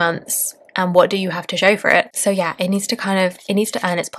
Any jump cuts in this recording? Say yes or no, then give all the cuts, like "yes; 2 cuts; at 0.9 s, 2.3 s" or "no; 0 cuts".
no; 0 cuts